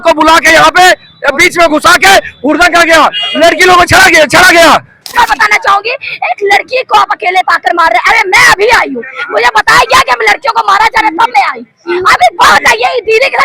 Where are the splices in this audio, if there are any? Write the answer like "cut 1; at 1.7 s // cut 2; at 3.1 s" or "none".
cut 1; at 5.1 s